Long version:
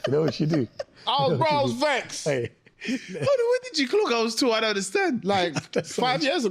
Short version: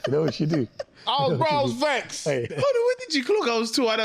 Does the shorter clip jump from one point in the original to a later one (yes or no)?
yes